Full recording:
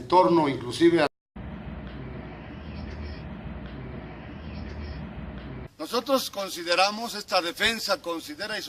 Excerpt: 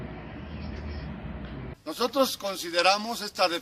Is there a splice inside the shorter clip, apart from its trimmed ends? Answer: yes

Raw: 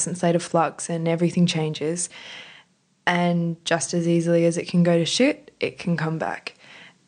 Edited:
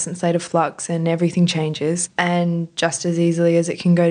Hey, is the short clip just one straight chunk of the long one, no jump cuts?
no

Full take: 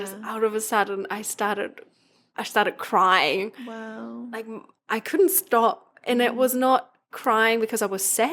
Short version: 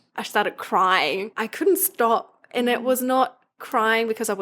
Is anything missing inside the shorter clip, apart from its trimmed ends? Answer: yes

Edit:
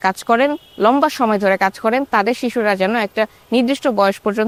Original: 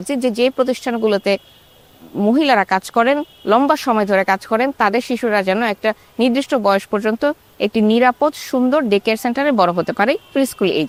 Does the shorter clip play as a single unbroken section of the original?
yes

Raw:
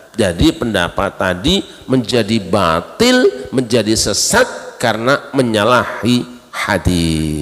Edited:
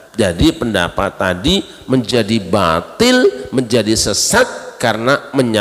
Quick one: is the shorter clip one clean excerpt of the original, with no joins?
yes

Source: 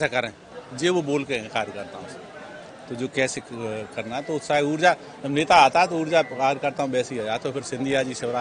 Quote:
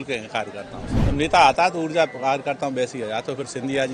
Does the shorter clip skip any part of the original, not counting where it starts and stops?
yes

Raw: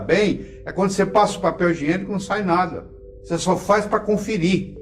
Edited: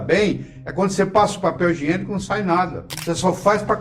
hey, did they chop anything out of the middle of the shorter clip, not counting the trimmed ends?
yes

